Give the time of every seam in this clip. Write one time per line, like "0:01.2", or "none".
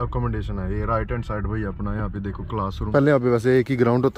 0:02.8